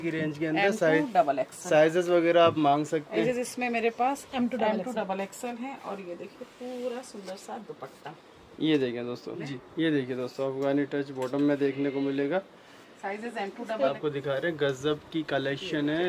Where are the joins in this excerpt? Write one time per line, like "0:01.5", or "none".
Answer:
0:03.2
0:09.6
0:14.0